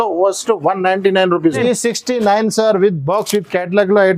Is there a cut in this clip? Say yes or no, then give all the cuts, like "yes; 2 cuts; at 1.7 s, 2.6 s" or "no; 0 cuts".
yes; 1 cut; at 1.6 s